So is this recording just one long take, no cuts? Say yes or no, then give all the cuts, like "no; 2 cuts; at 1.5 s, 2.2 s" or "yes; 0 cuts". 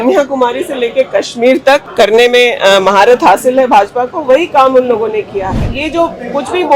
no; 2 cuts; at 1.9 s, 5.8 s